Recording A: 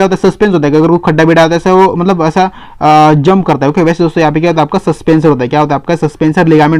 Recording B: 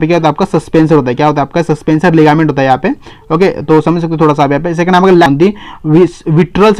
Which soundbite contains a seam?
B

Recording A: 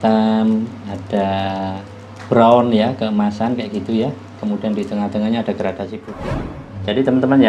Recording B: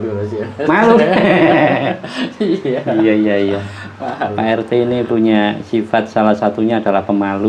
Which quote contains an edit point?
A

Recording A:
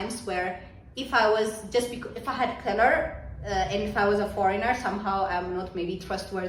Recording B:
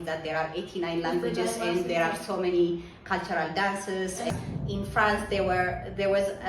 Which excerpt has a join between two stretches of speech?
B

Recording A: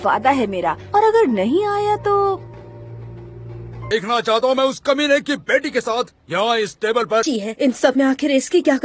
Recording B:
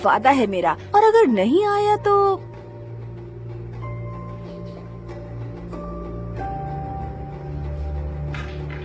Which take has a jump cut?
A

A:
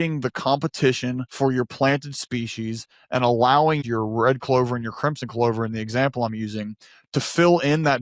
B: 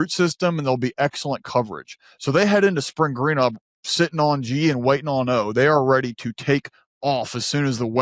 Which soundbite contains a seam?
A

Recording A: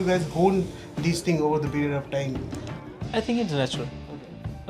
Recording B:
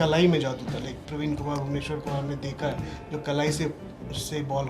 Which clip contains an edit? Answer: B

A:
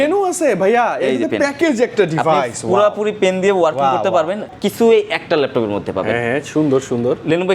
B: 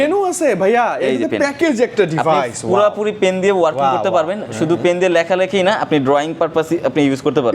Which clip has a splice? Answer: A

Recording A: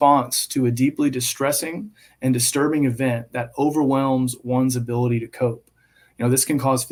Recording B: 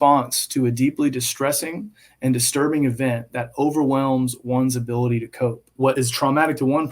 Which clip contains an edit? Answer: B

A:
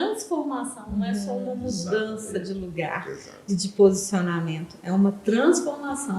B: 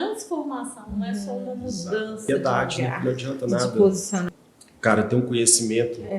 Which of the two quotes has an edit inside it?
B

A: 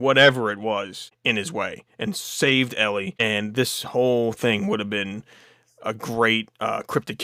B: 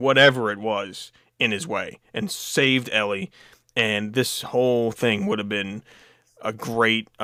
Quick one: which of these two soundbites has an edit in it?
A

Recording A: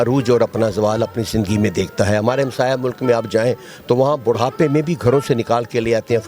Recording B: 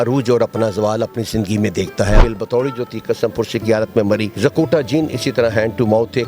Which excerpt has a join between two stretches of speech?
B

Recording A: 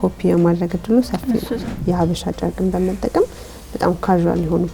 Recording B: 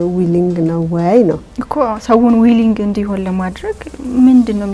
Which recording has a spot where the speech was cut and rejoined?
A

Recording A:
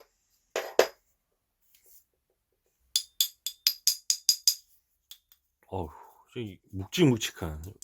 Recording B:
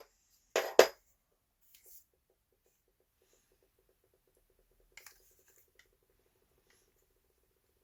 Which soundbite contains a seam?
A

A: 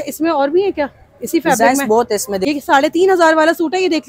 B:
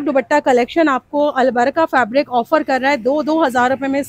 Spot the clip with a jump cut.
A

